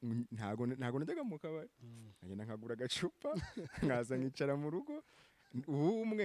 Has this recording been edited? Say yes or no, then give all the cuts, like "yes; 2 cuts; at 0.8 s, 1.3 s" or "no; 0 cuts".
no; 0 cuts